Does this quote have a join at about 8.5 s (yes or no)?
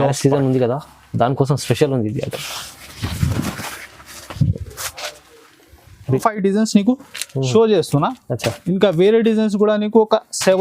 no